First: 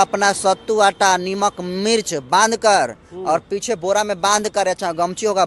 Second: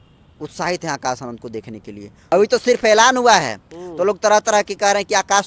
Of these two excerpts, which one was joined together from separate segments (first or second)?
second